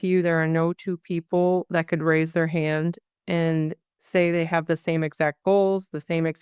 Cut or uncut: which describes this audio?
uncut